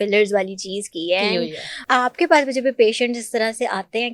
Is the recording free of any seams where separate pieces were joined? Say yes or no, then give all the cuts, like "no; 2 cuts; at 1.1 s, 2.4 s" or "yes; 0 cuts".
no; 1 cut; at 1.8 s